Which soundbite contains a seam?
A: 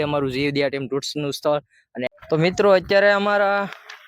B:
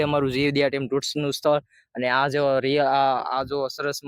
A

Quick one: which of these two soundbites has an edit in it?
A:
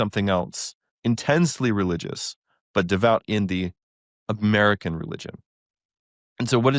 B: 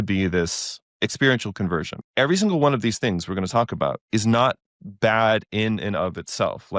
B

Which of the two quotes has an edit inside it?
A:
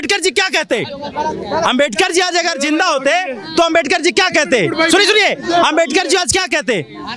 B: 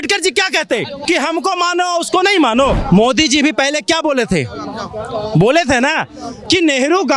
B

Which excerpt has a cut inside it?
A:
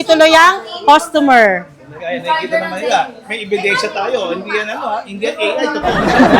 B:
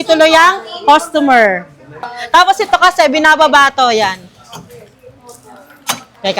B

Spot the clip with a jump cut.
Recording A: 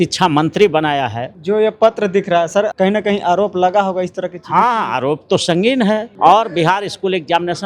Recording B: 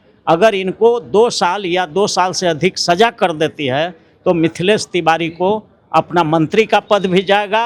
A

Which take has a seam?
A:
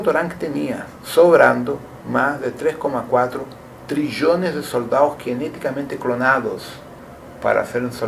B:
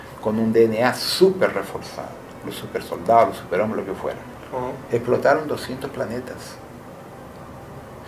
B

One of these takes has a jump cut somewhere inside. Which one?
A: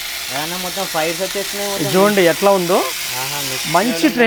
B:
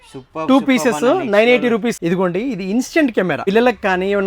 B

